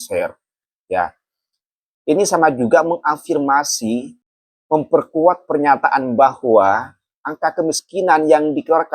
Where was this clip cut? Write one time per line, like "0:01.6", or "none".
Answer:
0:04.2

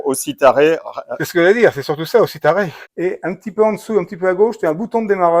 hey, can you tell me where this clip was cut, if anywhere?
0:02.8

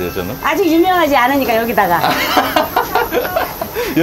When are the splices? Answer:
none

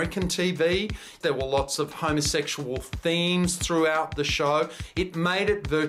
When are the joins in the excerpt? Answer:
0:01.1
0:04.8

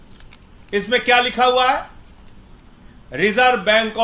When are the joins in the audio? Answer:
none

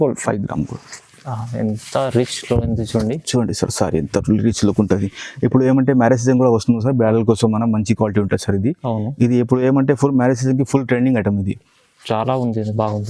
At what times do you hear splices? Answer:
none

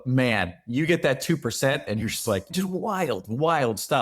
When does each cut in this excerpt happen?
0:02.5

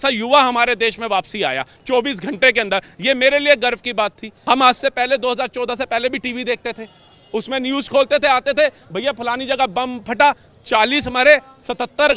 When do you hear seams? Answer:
0:04.3

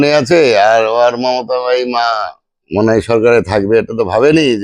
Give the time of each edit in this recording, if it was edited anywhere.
none

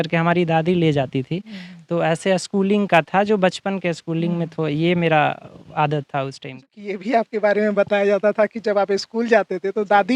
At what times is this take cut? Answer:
0:06.9

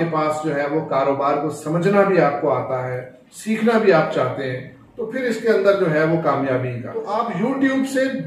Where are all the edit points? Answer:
0:07.1

